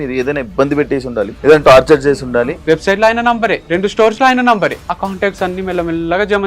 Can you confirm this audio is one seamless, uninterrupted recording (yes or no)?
no